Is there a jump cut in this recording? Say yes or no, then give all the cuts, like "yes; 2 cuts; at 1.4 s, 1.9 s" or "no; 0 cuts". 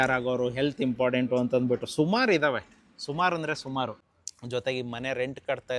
yes; 1 cut; at 4.0 s